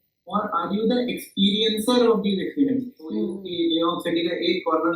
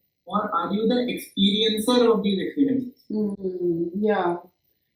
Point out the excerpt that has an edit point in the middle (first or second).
first